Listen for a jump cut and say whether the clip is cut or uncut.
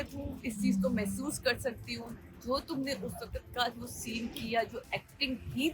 uncut